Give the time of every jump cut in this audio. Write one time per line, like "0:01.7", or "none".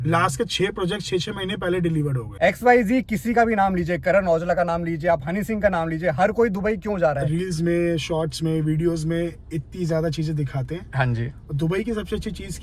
0:02.4
0:07.2